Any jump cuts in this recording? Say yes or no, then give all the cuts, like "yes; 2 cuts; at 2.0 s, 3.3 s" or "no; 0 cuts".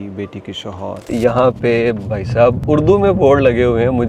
yes; 2 cuts; at 1.1 s, 2.6 s